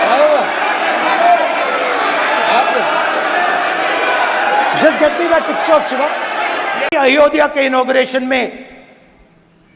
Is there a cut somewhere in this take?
yes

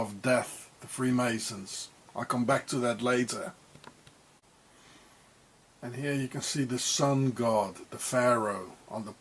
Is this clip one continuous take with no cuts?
yes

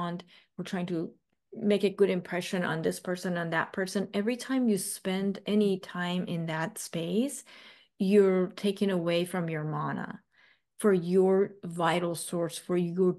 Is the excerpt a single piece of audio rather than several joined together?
no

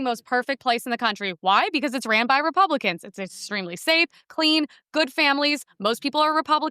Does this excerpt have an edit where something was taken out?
no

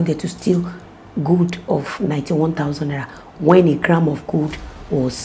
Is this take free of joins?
yes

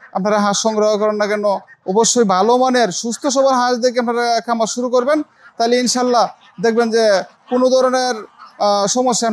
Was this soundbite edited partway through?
no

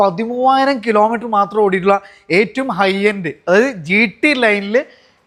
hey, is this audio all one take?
yes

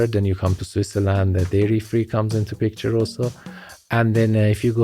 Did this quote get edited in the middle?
no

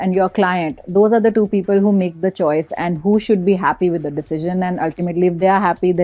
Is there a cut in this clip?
no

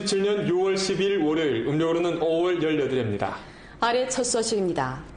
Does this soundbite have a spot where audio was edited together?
no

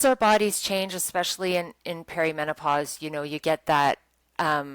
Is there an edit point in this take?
no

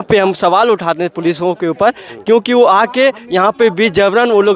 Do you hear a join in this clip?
no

